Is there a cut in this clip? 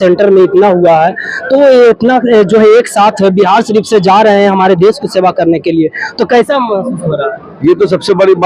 no; 0 cuts

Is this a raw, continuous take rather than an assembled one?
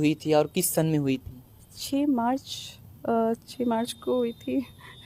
yes; 0 cuts

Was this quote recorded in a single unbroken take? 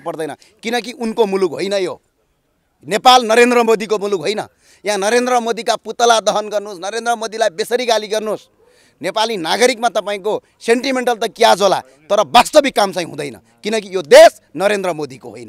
yes; 0 cuts

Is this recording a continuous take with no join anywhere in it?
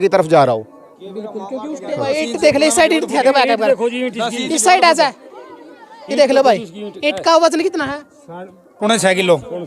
no; 1 cut; at 2.0 s

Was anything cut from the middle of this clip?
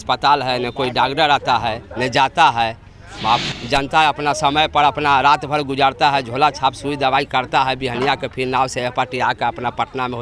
no; 0 cuts

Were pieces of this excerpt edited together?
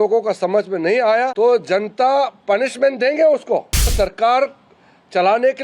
yes; 2 cuts; at 1.3 s, 3.9 s

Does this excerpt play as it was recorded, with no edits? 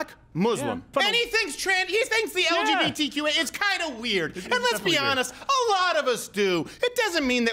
no; 1 cut; at 0.9 s

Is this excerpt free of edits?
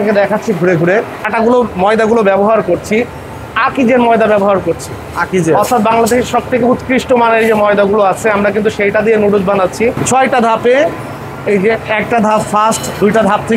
no; 2 cuts; at 1.2 s, 10.0 s

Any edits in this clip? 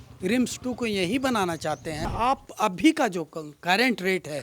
yes; 1 cut; at 2.1 s

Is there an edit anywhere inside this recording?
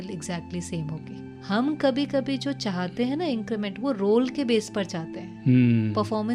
yes; 1 cut; at 1.3 s

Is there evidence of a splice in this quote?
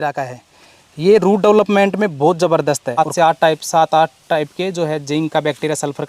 yes; 1 cut; at 3.0 s

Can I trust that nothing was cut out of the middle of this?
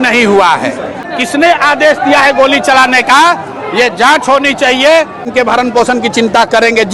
no; 2 cuts; at 1.1 s, 5.3 s

